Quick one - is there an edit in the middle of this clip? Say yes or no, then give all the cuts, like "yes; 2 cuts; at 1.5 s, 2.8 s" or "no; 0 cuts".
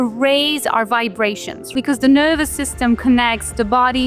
yes; 1 cut; at 1.7 s